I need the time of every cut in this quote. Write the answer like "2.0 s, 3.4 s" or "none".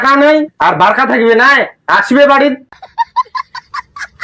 none